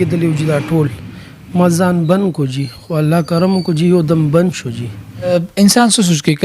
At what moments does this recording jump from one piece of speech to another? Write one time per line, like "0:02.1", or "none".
0:05.3